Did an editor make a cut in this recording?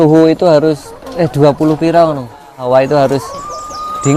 yes; 1 cut; at 2.6 s

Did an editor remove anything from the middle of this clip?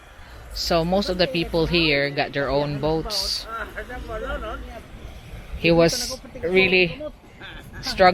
yes; 1 cut; at 4.9 s

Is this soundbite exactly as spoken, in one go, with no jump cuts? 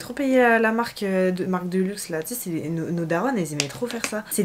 yes; 0 cuts

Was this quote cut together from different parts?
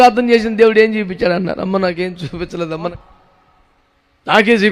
yes; 1 cut; at 2.7 s

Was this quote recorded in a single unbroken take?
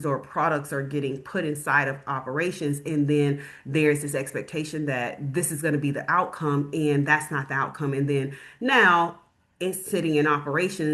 yes; 0 cuts

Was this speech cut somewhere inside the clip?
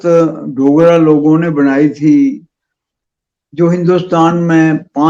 no; 0 cuts

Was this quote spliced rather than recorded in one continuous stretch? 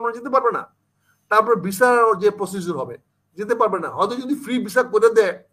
no; 0 cuts

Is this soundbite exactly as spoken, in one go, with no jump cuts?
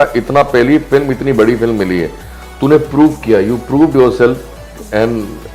yes; 0 cuts

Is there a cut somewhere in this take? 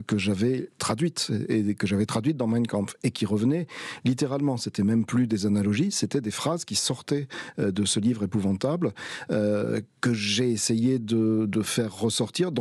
no; 0 cuts

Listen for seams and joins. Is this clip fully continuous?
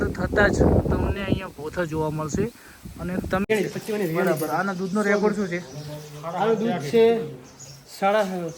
no; 1 cut; at 3.5 s

